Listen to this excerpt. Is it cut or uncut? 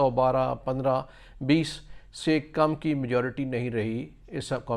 uncut